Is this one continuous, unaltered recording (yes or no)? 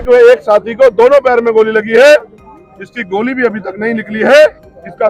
yes